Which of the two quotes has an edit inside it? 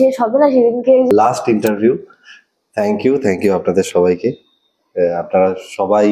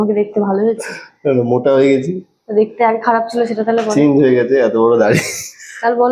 first; 1 cut; at 1.1 s

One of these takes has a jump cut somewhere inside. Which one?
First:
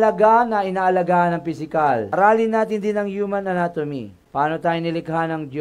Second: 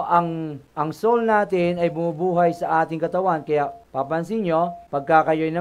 first; 1 cut; at 2.1 s

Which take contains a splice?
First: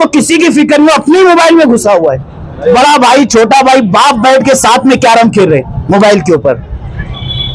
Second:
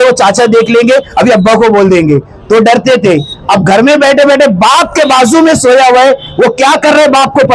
first; 1 cut; at 2.8 s

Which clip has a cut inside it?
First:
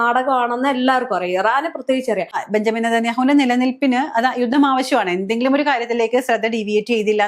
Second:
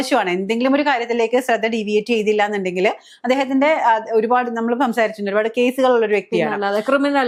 first; 1 cut; at 2.4 s

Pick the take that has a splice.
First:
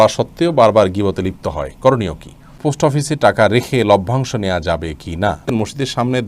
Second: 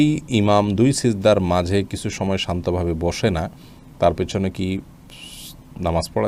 first; 2 cuts; at 2.6 s, 5.5 s

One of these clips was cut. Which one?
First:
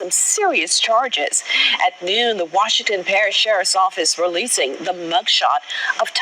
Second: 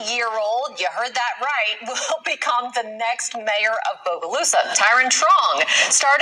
second; 1 cut; at 5.1 s

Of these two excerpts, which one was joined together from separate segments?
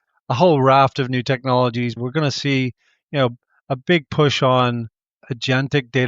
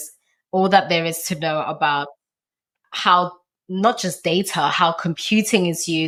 first; 2 cuts; at 2.0 s, 5.1 s

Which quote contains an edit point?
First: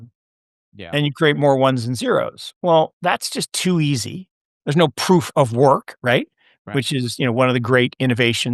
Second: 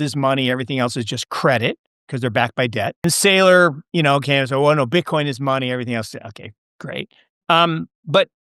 second; 1 cut; at 3.0 s

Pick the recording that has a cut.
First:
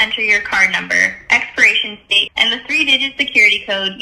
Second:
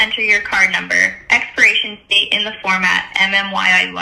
first; 1 cut; at 2.2 s

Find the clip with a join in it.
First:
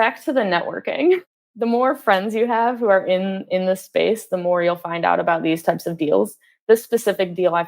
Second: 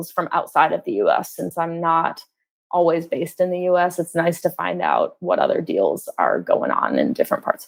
first; 1 cut; at 1.3 s

